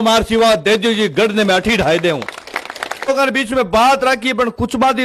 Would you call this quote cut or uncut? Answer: cut